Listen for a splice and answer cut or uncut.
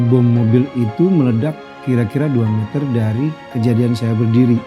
cut